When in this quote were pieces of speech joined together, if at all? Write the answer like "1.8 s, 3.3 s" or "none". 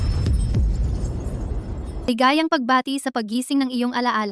2.1 s